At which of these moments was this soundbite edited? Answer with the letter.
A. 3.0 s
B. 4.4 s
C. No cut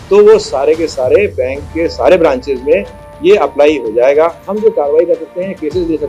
B